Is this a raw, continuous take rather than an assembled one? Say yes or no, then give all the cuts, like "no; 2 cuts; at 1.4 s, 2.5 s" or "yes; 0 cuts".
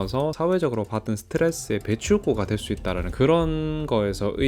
yes; 0 cuts